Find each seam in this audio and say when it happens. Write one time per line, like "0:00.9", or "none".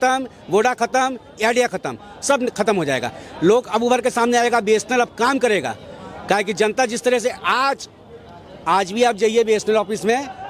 none